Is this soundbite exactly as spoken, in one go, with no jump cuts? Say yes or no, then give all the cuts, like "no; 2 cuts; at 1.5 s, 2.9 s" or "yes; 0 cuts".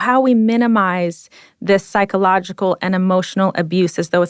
yes; 0 cuts